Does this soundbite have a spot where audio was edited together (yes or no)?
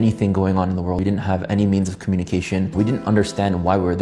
yes